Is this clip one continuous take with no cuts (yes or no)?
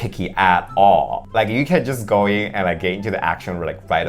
no